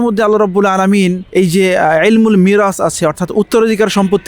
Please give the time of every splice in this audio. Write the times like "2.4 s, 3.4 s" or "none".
1.2 s